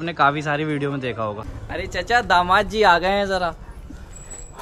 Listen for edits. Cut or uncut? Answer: cut